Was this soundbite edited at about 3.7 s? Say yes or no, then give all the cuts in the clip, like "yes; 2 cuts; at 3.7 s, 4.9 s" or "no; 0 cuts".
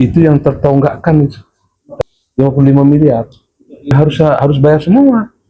yes; 2 cuts; at 1.9 s, 3.7 s